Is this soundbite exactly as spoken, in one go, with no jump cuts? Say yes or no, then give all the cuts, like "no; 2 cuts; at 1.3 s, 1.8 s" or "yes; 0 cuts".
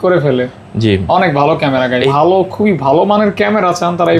no; 1 cut; at 2.1 s